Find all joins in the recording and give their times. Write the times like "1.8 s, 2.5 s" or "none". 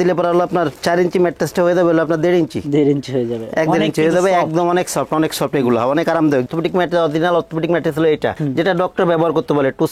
6.5 s